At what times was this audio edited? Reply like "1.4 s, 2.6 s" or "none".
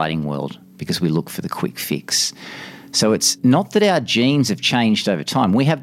3.3 s